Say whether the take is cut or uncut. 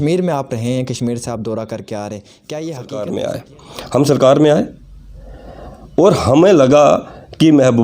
cut